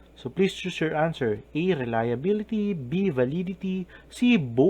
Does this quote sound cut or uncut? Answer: cut